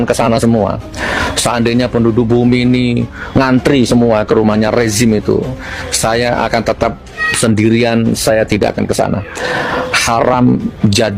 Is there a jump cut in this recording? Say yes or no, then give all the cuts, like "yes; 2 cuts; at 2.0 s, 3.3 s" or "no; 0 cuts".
no; 0 cuts